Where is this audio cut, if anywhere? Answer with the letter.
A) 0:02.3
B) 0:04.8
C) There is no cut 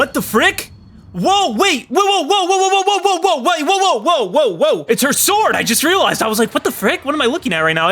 B